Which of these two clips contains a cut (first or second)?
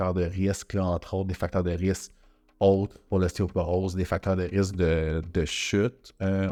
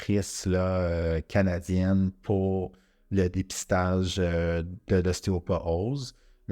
second